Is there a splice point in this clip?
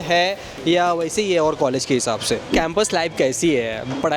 yes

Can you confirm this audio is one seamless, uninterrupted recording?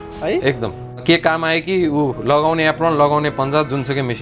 no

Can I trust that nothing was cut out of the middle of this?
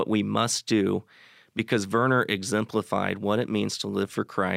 yes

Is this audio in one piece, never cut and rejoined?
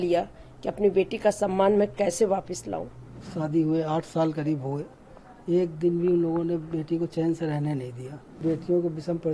no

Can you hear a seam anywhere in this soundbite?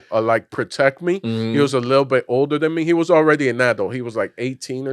no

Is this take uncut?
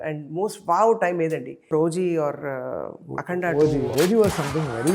no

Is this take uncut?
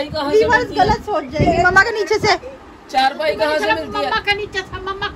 yes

